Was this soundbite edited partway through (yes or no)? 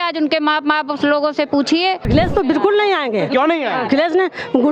yes